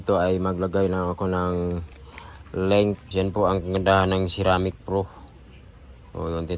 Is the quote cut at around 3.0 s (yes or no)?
yes